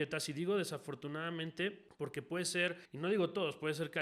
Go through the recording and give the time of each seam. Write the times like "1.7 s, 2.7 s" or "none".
1.9 s, 2.9 s